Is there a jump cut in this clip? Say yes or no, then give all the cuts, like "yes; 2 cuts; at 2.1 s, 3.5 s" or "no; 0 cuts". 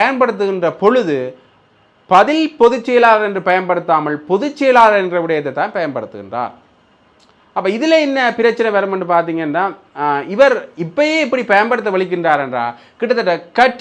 no; 0 cuts